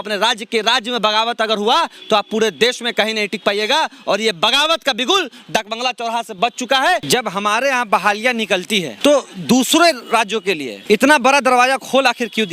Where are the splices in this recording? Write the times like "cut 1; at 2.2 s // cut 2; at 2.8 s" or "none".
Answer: cut 1; at 7.0 s // cut 2; at 8.9 s // cut 3; at 10.7 s